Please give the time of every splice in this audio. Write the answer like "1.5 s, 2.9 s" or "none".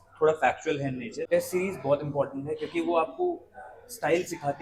1.2 s